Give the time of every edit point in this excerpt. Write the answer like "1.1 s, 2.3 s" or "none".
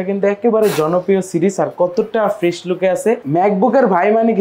3.2 s